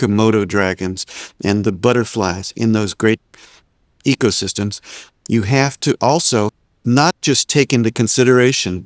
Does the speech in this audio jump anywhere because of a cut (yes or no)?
no